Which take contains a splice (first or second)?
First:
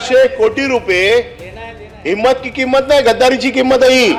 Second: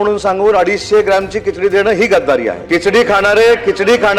second